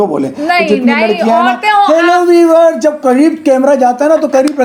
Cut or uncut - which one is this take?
uncut